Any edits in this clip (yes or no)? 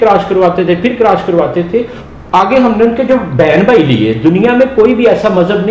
yes